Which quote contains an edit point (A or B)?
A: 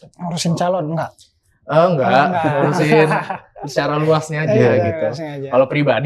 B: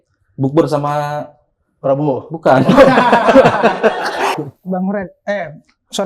B